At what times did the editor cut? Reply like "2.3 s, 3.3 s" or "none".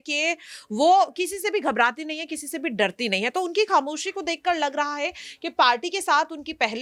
none